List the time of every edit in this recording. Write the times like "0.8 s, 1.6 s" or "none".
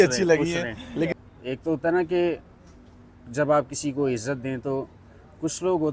1.1 s